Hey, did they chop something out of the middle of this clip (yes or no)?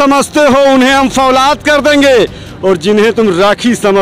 no